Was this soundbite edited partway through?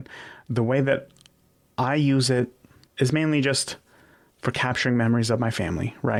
no; 0 cuts

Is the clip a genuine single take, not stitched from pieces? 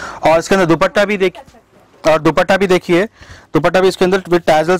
yes; 0 cuts

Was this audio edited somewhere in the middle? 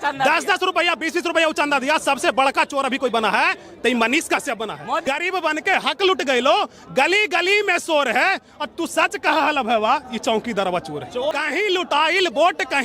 yes; 2 cuts; at 5.0 s, 11.3 s

